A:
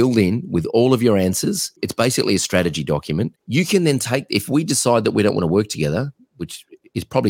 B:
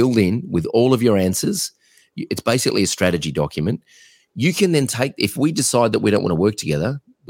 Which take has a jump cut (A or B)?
A